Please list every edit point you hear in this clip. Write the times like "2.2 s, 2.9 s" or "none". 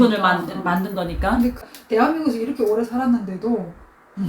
1.6 s